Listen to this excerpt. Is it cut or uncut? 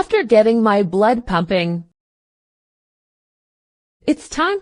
uncut